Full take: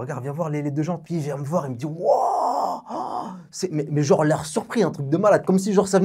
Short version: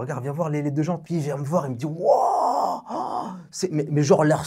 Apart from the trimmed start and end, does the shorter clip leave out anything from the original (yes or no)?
no